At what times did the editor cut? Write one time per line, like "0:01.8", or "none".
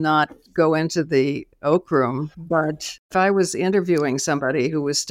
0:03.0